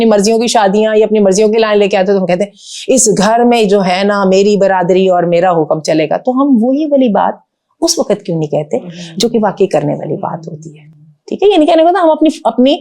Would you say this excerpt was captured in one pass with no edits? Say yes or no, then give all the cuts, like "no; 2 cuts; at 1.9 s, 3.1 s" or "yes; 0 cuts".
yes; 0 cuts